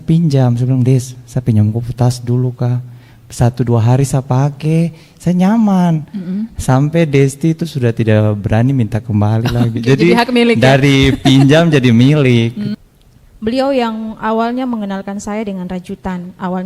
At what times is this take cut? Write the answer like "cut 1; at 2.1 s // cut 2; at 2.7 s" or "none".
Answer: cut 1; at 12.7 s